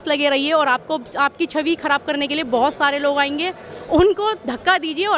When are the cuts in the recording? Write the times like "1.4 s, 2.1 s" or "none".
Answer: none